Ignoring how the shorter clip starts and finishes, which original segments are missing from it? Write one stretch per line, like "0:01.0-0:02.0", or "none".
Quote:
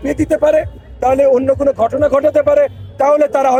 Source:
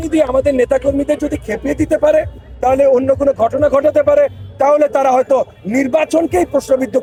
none